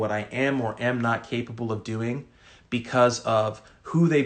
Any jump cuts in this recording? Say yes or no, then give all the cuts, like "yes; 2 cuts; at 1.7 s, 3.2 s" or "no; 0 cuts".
no; 0 cuts